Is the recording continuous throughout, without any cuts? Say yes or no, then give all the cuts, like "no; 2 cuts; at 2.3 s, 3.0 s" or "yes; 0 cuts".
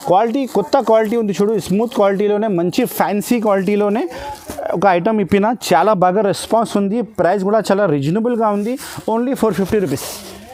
yes; 0 cuts